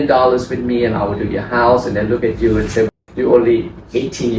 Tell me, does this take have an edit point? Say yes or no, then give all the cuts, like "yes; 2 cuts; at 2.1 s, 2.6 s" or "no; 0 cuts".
yes; 1 cut; at 2.9 s